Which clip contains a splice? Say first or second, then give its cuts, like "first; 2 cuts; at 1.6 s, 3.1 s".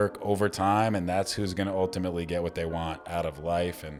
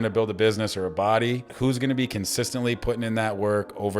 second; 1 cut; at 1.5 s